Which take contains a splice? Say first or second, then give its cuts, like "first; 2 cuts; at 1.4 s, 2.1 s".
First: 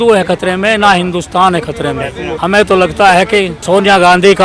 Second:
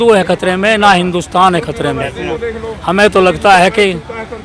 first; 2 cuts; at 2.3 s, 3.6 s